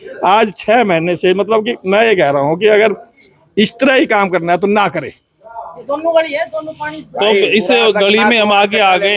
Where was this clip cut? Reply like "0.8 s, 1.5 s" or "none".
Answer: 5.7 s